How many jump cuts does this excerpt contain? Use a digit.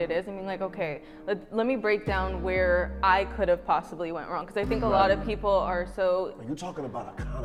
0